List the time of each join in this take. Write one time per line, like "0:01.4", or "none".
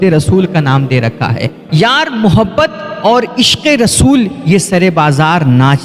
none